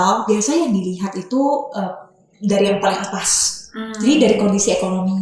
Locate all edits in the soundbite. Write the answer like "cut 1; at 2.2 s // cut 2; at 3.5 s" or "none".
none

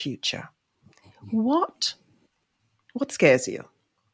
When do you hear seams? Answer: none

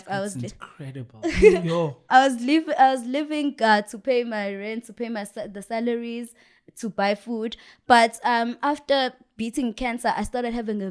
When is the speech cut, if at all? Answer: none

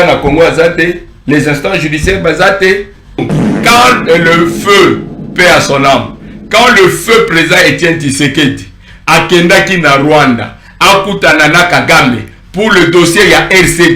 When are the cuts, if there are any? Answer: cut 1; at 3.3 s

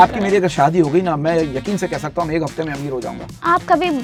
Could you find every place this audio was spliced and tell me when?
none

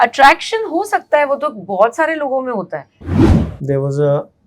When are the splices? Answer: cut 1; at 3.1 s

